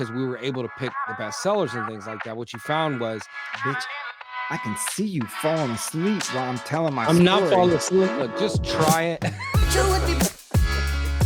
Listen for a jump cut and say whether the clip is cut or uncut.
uncut